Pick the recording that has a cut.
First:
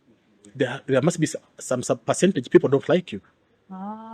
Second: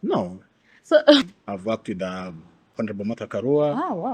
second; 2 cuts; at 1.4 s, 2.7 s

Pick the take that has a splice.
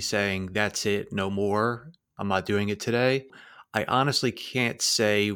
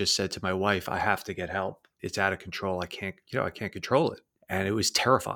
second; 1 cut; at 4.3 s

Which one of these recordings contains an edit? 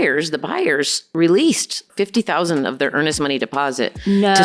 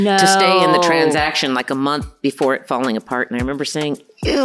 first; 2 cuts; at 1.0 s, 1.9 s

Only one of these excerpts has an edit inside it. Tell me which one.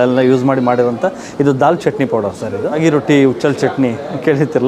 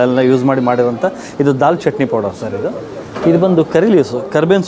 first; 1 cut; at 2.8 s

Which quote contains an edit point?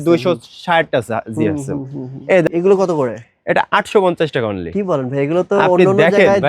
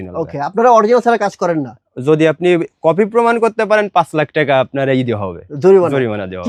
first; 1 cut; at 2.5 s

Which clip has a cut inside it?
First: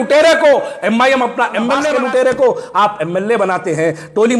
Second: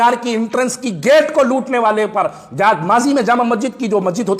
first; 1 cut; at 1.8 s

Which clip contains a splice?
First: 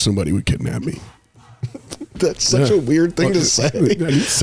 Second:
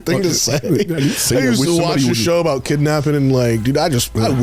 first; 1 cut; at 2.2 s

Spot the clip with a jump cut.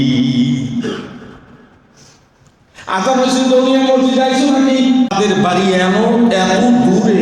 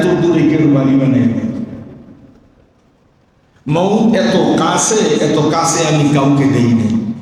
first; 1 cut; at 5.1 s

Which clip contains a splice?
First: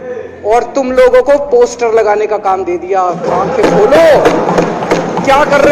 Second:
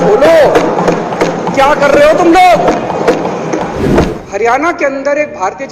second; 1 cut; at 4.2 s

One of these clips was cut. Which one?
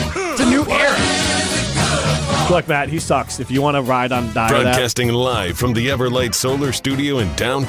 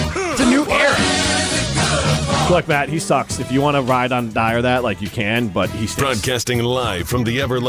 first; 1 cut; at 4.8 s

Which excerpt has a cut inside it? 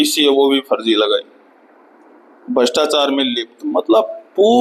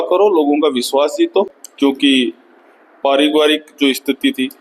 second; 1 cut; at 1.6 s

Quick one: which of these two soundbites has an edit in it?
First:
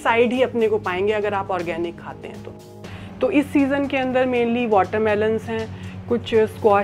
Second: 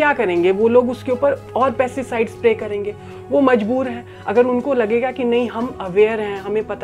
first; 1 cut; at 2.7 s

